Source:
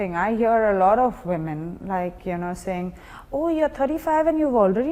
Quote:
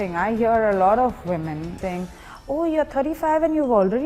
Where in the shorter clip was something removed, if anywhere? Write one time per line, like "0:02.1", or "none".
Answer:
0:01.8